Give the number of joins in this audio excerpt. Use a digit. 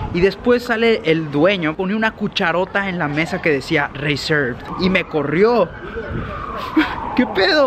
2